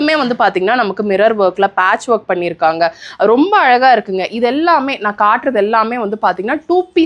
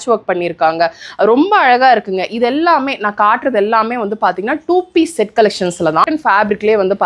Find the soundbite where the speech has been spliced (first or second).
second